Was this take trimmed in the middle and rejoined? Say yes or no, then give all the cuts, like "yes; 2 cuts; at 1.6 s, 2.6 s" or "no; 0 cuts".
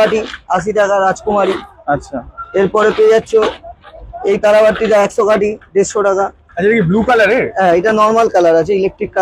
no; 0 cuts